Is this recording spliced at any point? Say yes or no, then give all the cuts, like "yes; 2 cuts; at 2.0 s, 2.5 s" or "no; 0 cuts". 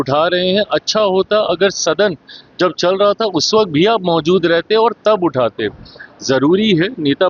no; 0 cuts